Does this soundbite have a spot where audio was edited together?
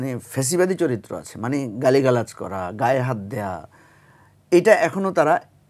no; 0 cuts

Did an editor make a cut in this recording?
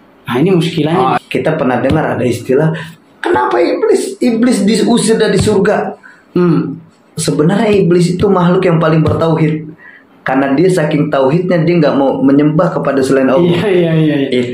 yes; 1 cut; at 1.2 s

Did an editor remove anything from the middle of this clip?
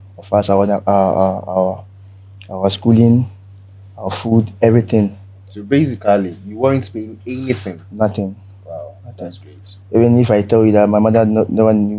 no; 0 cuts

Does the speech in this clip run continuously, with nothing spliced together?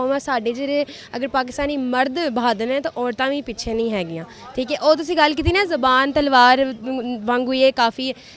yes; 0 cuts

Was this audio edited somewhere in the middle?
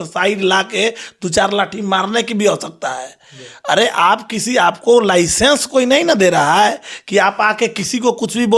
no; 0 cuts

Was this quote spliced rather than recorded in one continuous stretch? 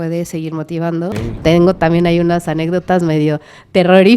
yes; 1 cut; at 1.2 s

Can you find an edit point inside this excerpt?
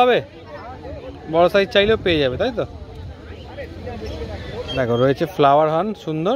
no; 0 cuts

